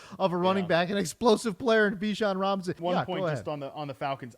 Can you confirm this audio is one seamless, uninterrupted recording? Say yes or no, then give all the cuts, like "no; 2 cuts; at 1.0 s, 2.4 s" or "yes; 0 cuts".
no; 1 cut; at 2.8 s